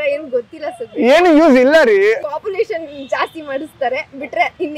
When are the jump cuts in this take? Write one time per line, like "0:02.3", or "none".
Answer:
0:02.2